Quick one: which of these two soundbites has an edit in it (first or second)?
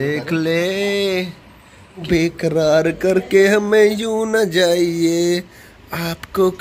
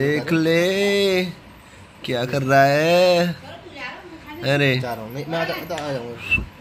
first